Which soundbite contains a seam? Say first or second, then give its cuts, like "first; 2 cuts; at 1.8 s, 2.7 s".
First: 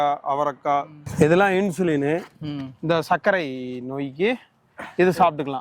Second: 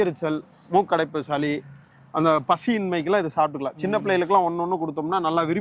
first; 1 cut; at 1.0 s